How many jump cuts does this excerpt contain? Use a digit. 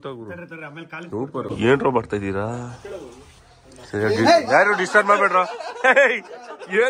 1